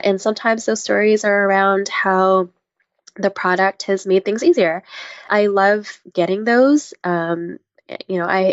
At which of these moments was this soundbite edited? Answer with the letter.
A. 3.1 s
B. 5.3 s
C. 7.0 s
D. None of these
B